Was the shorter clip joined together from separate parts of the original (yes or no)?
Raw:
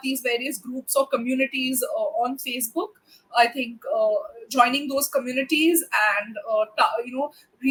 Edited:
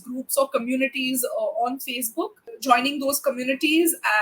yes